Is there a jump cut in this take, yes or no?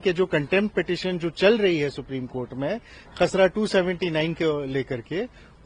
no